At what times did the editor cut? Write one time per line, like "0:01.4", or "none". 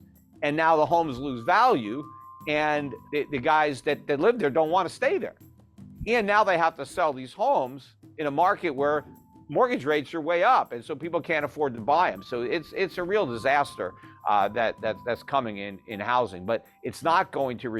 0:02.9